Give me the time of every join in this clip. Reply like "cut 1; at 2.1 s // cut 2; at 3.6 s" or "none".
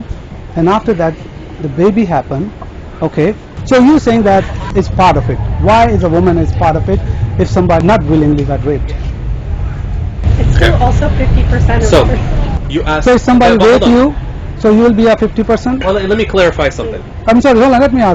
cut 1; at 3.5 s // cut 2; at 4.6 s // cut 3; at 7.8 s